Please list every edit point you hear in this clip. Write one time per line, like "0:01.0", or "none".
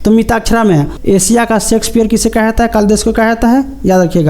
0:00.9